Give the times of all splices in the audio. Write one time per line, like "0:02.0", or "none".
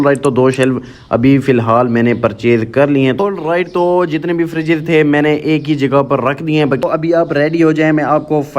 0:03.2
0:06.8